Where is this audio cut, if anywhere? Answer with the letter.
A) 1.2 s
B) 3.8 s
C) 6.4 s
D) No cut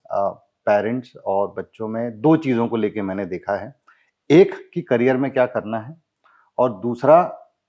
D